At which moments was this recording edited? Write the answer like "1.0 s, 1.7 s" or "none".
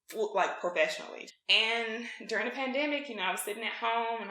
1.1 s